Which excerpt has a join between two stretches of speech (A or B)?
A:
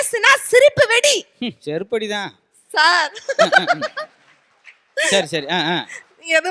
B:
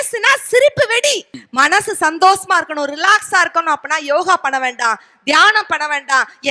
B